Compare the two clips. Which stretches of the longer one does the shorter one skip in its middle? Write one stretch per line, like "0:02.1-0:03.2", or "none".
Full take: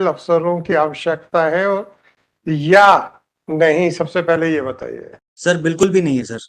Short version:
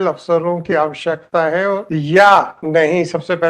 0:01.9-0:02.4
0:03.1-0:03.4